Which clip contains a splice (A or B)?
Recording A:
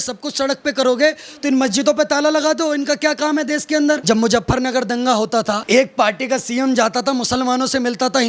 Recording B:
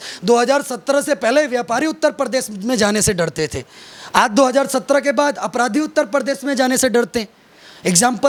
A